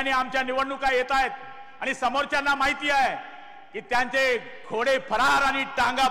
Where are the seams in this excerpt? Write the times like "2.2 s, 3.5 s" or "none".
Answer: none